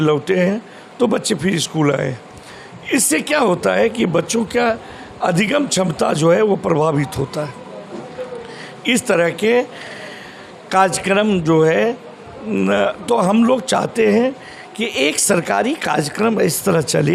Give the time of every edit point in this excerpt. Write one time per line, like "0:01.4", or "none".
none

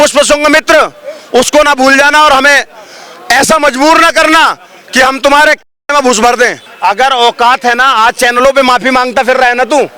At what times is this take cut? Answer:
0:06.7

